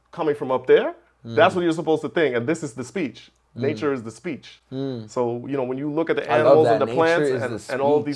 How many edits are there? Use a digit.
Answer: 0